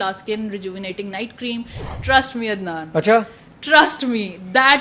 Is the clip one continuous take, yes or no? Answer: no